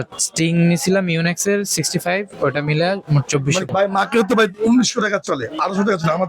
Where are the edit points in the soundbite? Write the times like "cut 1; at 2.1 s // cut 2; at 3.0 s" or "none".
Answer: cut 1; at 3.7 s